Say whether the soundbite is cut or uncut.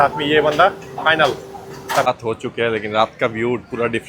cut